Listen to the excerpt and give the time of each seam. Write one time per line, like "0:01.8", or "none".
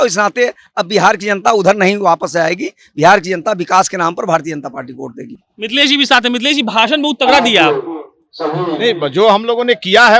none